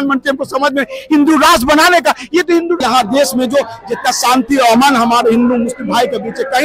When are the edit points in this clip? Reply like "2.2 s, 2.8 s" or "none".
2.8 s